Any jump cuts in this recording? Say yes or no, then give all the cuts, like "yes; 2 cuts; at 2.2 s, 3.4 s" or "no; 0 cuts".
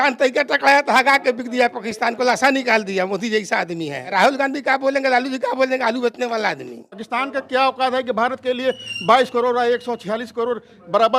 yes; 2 cuts; at 4.0 s, 7.1 s